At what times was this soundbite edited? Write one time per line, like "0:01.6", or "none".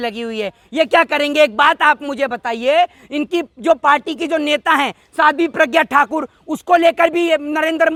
none